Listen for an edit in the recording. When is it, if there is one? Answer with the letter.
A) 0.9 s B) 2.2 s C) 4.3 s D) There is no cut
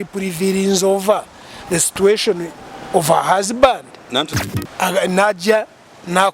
C